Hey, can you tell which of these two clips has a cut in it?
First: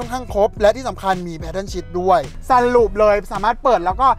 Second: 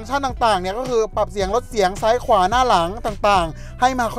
first; 1 cut; at 2.3 s

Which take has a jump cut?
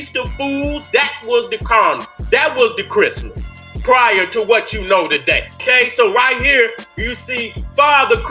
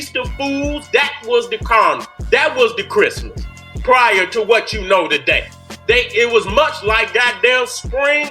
first; 1 cut; at 5.6 s

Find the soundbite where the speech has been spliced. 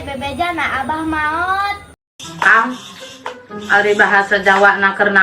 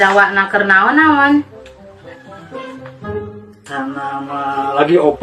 first; 1 cut; at 2.0 s

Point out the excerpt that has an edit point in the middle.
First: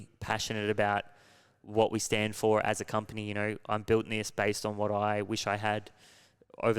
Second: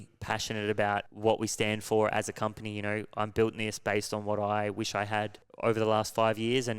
second; 2 cuts; at 1.1 s, 5.4 s

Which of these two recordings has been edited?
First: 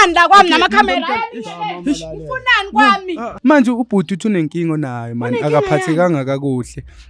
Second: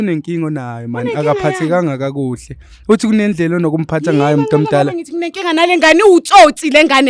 first; 1 cut; at 3.3 s

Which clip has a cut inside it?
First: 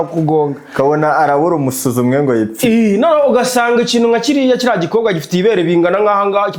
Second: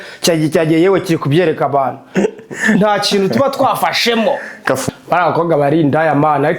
second; 1 cut; at 4.8 s

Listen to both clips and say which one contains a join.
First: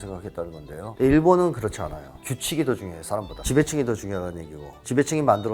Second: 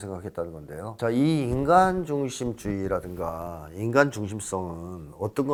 first; 2 cuts; at 0.8 s, 3.4 s

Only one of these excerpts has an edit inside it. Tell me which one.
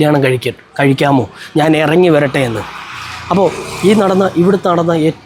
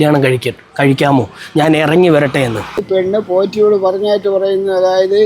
second; 1 cut; at 2.8 s

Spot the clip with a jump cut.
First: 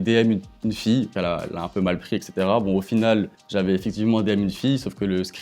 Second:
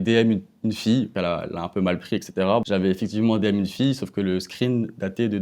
second; 1 cut; at 2.6 s

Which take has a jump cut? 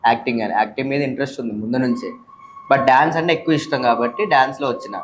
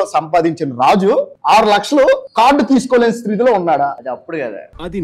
second; 3 cuts; at 1.3 s, 2.3 s, 4.0 s

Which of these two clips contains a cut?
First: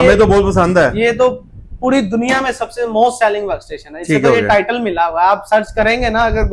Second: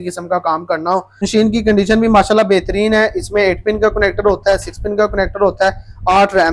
second; 1 cut; at 1.2 s

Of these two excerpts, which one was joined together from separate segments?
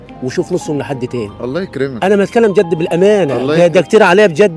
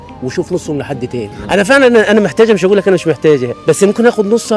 second; 1 cut; at 1.3 s

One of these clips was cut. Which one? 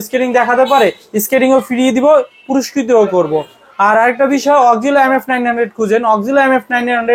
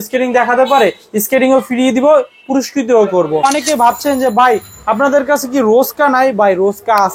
second; 1 cut; at 3.4 s

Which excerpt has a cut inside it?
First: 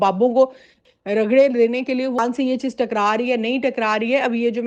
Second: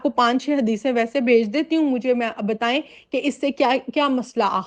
first; 1 cut; at 2.2 s

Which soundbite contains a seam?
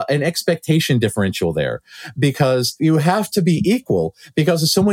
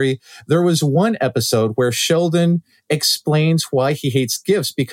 first; 1 cut; at 2.8 s

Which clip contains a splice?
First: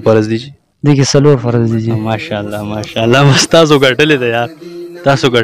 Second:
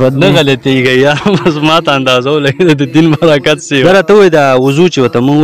second; 1 cut; at 3.8 s

